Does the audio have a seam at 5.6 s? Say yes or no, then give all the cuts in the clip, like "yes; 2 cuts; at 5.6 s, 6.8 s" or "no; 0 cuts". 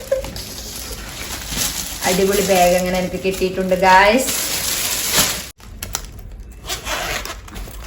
yes; 1 cut; at 5.6 s